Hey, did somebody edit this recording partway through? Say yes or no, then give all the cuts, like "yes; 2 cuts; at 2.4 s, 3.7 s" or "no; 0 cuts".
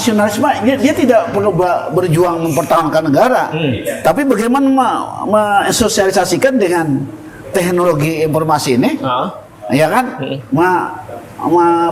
no; 0 cuts